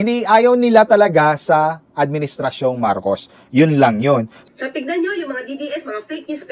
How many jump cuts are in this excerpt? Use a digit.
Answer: 1